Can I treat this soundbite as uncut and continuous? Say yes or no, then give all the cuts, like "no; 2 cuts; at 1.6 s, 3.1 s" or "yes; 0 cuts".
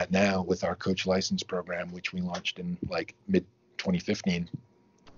no; 1 cut; at 3.2 s